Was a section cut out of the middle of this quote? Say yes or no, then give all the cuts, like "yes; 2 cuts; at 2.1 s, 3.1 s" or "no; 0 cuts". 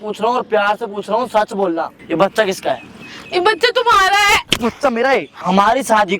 yes; 2 cuts; at 1.9 s, 5.4 s